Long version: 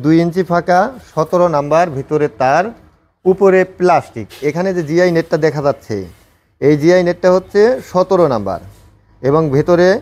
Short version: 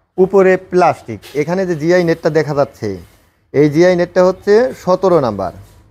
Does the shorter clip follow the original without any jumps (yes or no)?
yes